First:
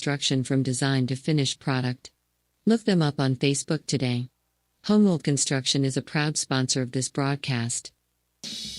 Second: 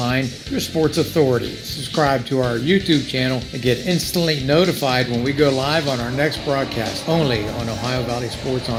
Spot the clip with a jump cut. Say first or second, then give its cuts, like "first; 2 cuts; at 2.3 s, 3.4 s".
first; 1 cut; at 7.8 s